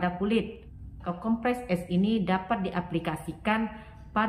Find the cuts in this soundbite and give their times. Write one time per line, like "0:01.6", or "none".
0:01.0